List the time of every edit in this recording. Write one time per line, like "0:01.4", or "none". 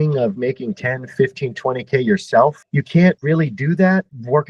none

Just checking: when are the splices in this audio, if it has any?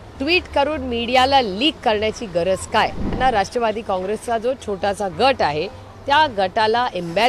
0:03.2

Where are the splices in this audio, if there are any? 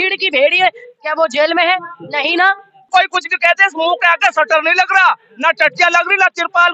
0:02.9

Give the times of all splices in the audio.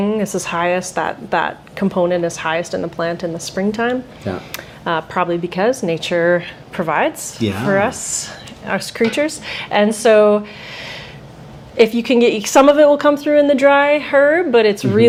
none

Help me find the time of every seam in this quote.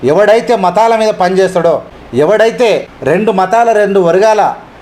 0:02.0
0:02.9

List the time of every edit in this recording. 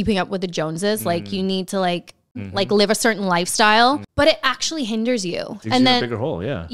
0:02.4
0:04.1

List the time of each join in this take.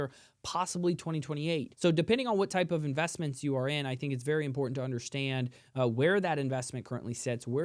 0:01.7

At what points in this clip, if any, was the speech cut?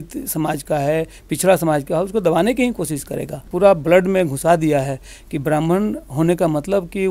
0:03.5

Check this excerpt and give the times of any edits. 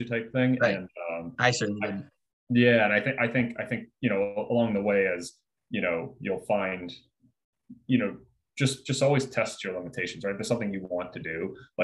none

